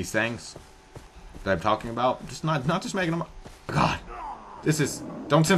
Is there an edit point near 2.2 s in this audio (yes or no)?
no